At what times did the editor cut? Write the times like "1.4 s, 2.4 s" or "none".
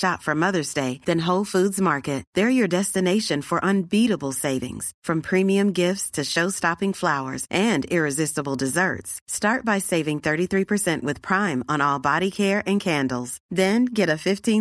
none